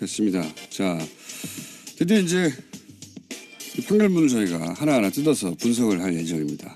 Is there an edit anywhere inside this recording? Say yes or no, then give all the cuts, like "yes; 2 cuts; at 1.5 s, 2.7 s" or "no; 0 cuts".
no; 0 cuts